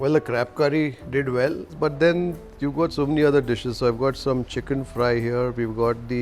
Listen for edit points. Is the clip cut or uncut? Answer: cut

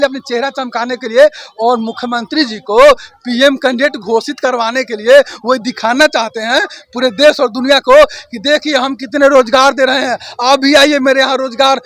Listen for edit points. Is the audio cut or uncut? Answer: uncut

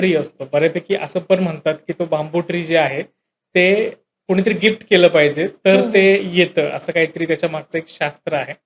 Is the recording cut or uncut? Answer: uncut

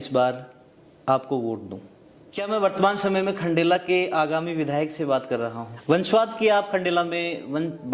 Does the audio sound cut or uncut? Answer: cut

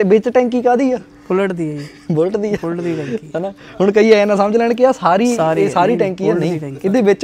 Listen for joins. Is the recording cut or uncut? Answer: uncut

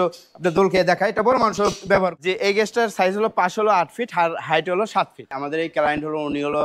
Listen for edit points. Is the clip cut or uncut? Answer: cut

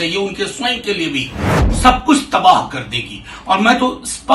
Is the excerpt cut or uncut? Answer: cut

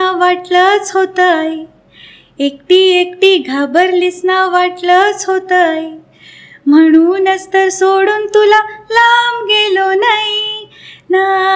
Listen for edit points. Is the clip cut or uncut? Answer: uncut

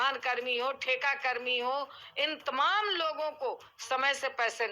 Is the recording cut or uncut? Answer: uncut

